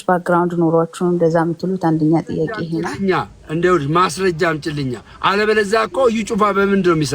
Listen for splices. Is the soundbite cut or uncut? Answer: cut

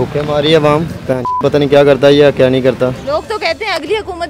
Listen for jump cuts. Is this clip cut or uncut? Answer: cut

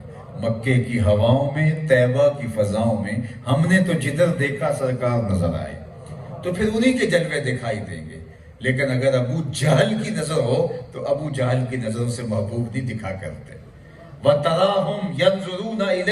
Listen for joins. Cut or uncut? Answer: uncut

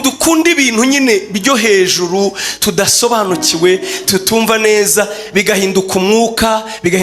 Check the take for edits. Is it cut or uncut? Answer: uncut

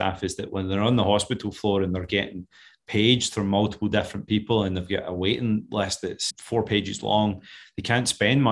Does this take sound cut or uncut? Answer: uncut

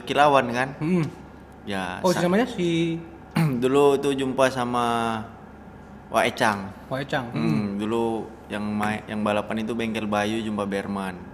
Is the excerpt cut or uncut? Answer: uncut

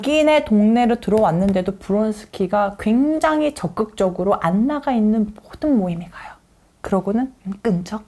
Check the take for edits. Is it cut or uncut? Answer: uncut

